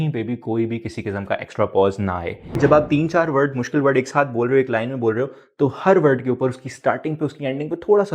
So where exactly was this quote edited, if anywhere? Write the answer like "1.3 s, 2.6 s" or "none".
2.6 s